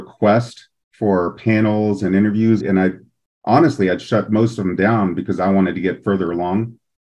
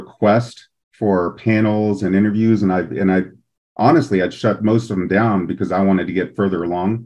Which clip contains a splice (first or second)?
first